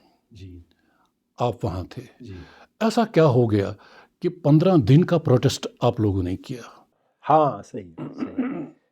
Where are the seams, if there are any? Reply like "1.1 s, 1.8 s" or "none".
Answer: 7.1 s

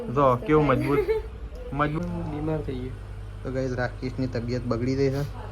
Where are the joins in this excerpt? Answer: 2.0 s

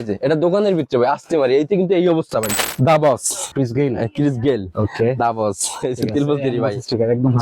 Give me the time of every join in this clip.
2.6 s, 3.5 s

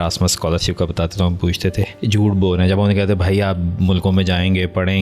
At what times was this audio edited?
1.9 s

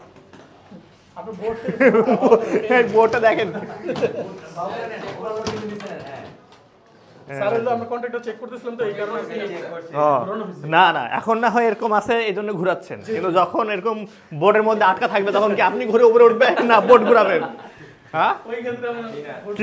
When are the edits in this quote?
none

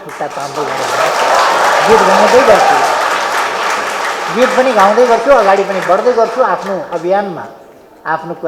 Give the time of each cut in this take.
none

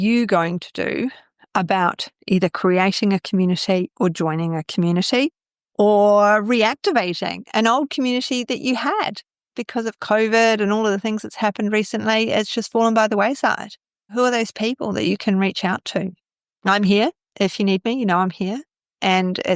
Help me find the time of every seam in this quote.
none

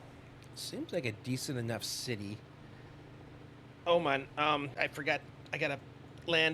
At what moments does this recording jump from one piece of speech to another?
4.7 s

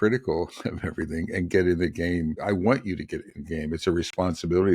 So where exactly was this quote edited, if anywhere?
2.4 s

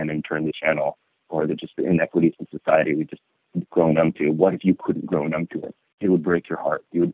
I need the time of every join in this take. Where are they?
none

